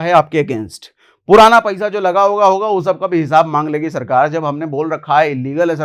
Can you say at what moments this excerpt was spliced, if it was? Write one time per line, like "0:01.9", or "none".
none